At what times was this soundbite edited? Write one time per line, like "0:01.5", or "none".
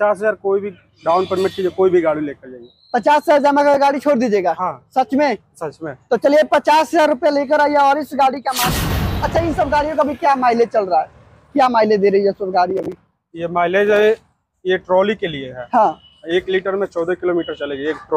0:08.6